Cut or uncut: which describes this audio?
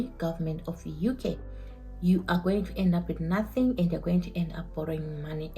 cut